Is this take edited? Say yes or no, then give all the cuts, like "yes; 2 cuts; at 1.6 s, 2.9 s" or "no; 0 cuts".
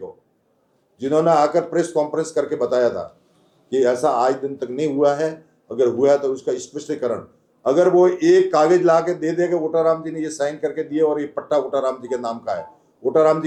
no; 0 cuts